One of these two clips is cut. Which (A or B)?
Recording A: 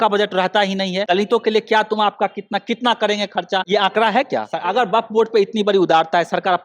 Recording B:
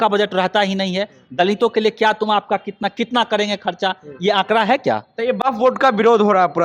A